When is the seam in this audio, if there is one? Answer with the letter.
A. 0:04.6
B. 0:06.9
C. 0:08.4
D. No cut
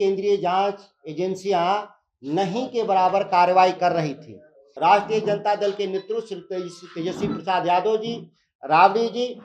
A